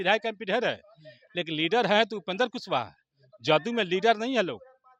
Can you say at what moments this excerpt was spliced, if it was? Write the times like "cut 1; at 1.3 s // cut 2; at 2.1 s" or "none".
none